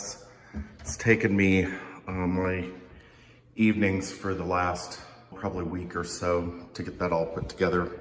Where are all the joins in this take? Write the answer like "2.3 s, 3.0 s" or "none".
5.4 s